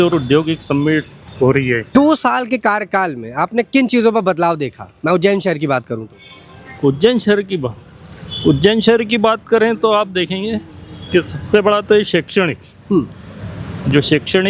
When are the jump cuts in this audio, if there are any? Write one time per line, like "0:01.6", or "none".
none